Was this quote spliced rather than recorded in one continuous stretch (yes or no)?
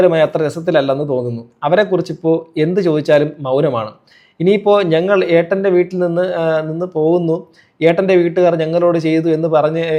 no